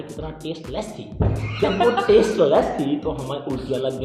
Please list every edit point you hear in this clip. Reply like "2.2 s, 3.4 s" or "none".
none